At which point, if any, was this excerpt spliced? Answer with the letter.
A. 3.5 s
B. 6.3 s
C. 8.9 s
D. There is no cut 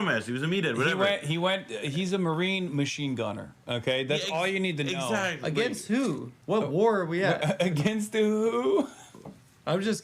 B